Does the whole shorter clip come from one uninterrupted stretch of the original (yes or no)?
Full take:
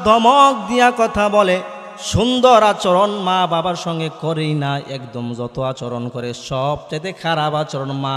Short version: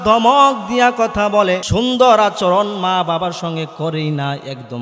no